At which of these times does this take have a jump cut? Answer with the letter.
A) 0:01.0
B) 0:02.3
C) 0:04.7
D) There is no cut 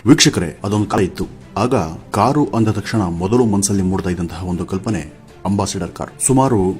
A